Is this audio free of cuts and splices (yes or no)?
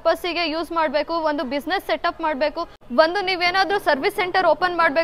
yes